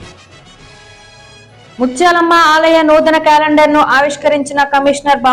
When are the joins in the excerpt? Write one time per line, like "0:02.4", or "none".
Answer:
0:00.9